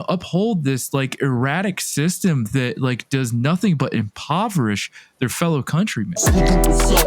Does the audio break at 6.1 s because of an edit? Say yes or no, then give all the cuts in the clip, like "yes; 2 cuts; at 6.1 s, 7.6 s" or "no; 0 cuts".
yes; 1 cut; at 6.1 s